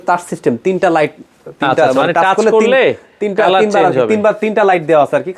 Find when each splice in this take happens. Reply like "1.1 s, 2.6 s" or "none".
none